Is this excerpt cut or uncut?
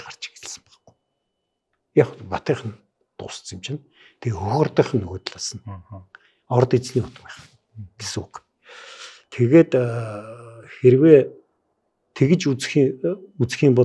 uncut